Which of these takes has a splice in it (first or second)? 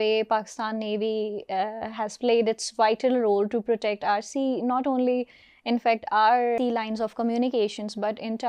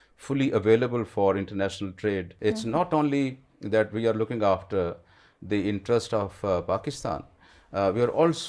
second